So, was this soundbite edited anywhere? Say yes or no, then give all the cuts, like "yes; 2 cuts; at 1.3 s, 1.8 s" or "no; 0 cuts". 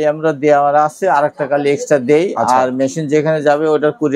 no; 0 cuts